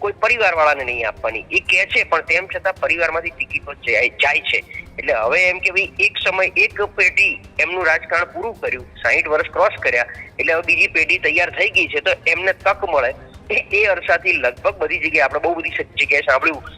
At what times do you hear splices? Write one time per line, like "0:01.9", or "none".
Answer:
none